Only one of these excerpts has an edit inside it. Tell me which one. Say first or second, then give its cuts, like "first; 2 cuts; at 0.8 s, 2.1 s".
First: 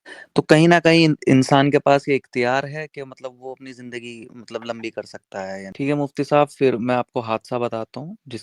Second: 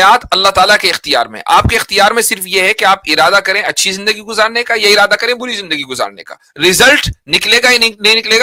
first; 1 cut; at 5.7 s